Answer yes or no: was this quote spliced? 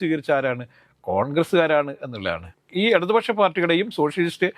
yes